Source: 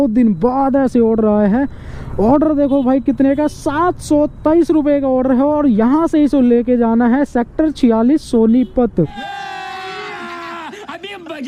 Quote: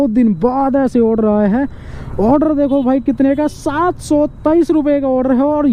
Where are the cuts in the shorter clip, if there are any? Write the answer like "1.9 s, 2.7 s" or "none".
none